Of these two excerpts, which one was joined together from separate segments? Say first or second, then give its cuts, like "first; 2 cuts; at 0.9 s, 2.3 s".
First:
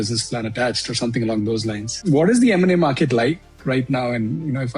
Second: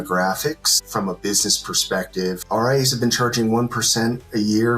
second; 2 cuts; at 0.8 s, 2.4 s